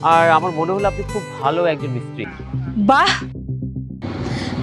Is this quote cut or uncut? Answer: cut